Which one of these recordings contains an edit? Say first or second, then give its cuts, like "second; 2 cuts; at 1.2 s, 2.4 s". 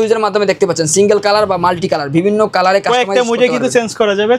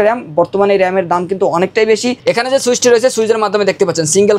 second; 1 cut; at 2.2 s